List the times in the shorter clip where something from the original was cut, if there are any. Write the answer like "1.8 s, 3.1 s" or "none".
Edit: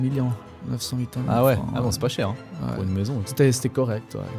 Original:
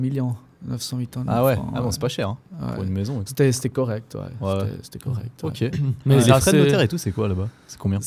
none